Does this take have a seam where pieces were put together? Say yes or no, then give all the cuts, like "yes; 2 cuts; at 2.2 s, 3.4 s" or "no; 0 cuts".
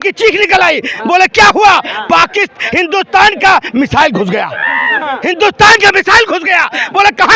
no; 0 cuts